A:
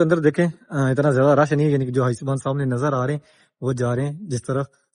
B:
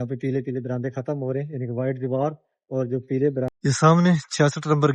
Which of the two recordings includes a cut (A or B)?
B